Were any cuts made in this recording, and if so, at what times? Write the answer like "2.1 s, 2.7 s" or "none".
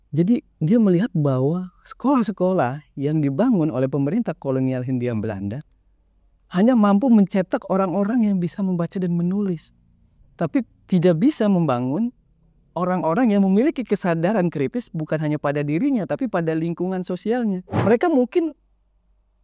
17.7 s